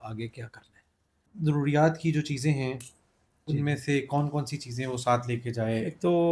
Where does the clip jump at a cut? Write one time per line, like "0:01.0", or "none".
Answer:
0:01.3